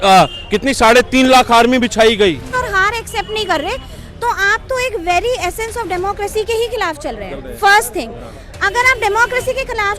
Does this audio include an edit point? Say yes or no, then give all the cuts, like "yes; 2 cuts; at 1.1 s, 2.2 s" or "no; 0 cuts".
yes; 1 cut; at 2.6 s